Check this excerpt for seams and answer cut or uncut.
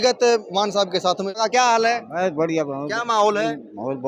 uncut